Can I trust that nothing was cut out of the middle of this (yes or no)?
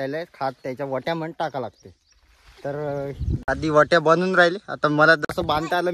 yes